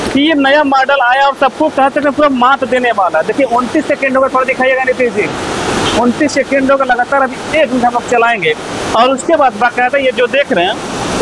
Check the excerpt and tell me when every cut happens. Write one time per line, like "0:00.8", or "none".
none